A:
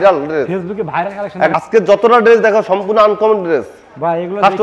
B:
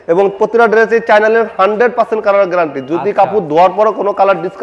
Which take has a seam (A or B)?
A